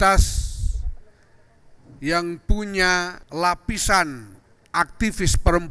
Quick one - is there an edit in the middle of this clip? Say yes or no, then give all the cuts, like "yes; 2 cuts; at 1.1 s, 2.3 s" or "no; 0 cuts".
yes; 1 cut; at 3.2 s